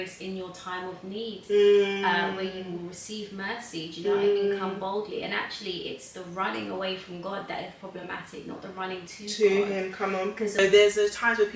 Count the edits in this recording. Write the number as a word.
one